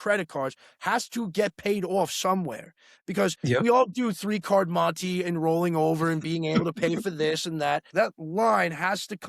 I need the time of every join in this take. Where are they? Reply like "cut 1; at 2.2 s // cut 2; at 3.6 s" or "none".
cut 1; at 7.9 s